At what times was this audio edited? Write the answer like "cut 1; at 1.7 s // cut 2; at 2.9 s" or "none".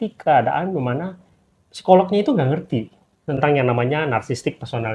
none